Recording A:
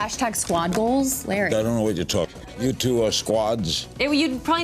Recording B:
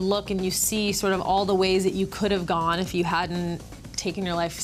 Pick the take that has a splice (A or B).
A